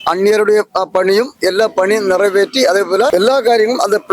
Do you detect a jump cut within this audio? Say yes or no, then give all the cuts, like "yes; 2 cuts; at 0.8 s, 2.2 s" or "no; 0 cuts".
yes; 1 cut; at 3.1 s